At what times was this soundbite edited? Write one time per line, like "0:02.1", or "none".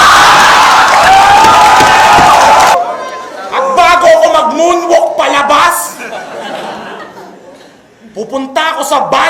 0:02.7